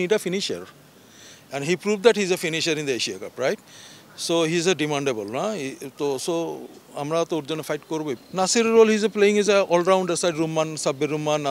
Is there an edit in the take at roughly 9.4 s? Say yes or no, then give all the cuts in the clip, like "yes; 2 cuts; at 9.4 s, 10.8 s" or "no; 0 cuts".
no; 1 cut; at 8.2 s